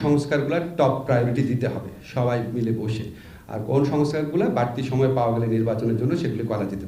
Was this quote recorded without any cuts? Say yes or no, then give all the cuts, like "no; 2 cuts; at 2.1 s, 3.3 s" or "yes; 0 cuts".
yes; 0 cuts